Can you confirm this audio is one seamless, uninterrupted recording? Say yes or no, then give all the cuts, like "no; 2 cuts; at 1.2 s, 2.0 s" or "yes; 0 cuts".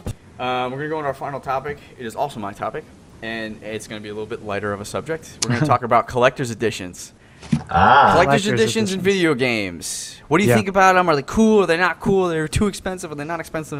yes; 0 cuts